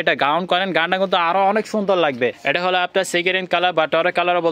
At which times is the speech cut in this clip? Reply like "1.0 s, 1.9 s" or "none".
2.4 s